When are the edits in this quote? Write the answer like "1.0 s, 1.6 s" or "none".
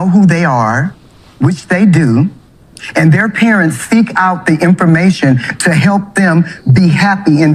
none